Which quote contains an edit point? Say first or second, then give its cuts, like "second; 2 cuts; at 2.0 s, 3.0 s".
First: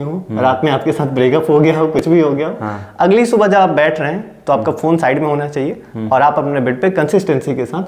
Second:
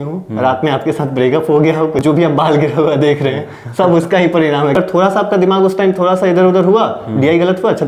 second; 2 cuts; at 2.0 s, 4.8 s